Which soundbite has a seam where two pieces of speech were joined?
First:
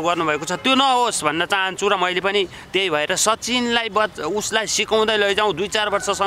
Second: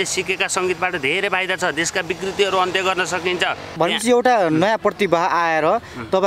second; 1 cut; at 3.7 s

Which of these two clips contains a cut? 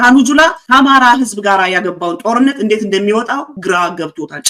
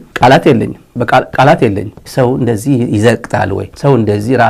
second; 1 cut; at 2.0 s

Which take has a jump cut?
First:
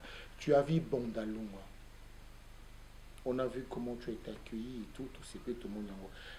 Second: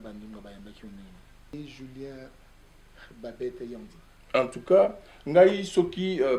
second; 1 cut; at 1.5 s

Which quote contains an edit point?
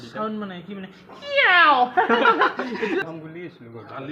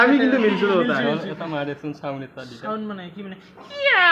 first; 1 cut; at 3.0 s

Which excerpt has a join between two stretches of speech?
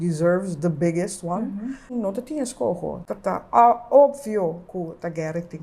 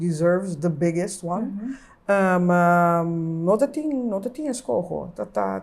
first; 2 cuts; at 1.9 s, 3.0 s

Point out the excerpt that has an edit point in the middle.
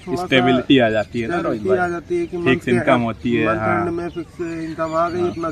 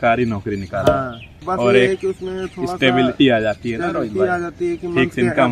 second; 1 cut; at 1.3 s

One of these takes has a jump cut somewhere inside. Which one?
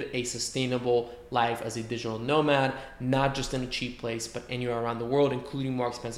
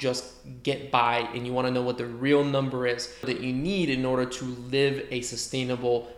second; 1 cut; at 3.3 s

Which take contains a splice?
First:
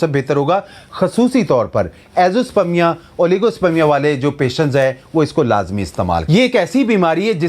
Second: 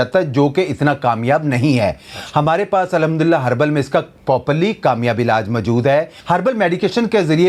first; 1 cut; at 6.3 s

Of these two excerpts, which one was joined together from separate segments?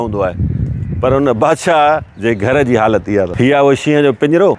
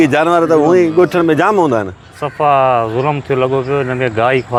first; 2 cuts; at 2.1 s, 3.3 s

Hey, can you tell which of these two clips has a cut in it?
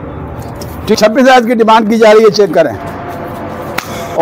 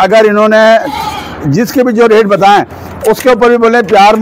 first; 1 cut; at 0.9 s

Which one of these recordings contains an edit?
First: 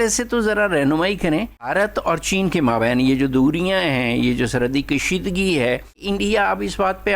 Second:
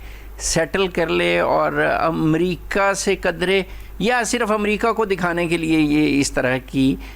first; 2 cuts; at 1.7 s, 6.0 s

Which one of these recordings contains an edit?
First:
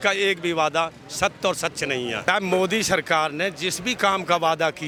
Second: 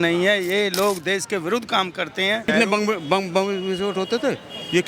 second; 1 cut; at 2.4 s

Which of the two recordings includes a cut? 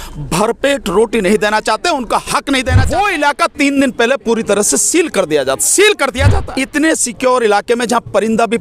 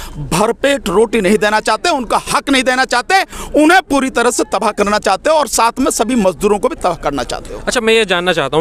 first; 2 cuts; at 2.8 s, 6.3 s

